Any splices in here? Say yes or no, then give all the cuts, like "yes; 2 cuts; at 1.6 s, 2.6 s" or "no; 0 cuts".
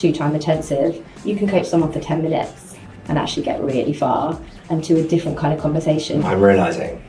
yes; 2 cuts; at 1.1 s, 6.2 s